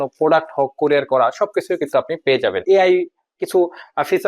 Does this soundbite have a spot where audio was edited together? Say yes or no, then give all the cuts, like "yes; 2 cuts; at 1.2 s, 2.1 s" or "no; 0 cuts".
yes; 1 cut; at 2.6 s